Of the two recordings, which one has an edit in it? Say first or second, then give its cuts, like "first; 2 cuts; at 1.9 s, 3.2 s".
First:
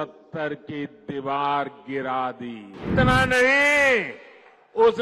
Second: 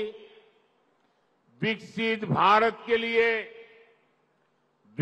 first; 1 cut; at 2.9 s